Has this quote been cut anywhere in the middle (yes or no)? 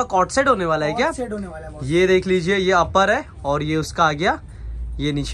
no